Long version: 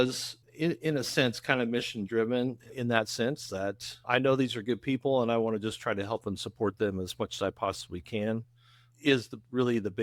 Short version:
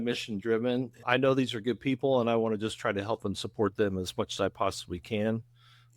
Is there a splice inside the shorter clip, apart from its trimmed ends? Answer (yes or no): yes